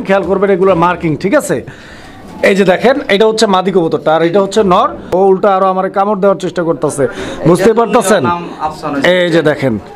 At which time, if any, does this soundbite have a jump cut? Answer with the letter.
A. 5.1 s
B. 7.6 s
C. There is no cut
A